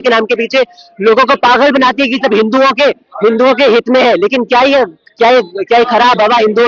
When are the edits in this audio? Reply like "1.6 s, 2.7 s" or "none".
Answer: none